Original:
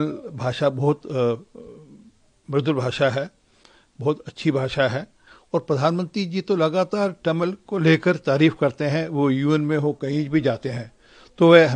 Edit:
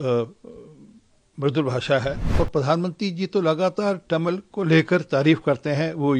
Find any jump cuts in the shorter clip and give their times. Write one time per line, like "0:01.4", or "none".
0:02.2